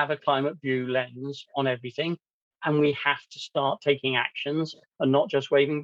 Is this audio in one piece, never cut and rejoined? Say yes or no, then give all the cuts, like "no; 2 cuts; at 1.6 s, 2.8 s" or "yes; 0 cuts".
yes; 0 cuts